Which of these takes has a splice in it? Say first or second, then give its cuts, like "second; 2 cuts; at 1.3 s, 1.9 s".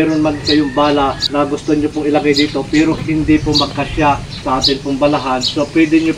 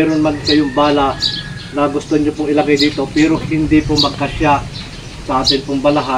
first; 2 cuts; at 1.2 s, 4.3 s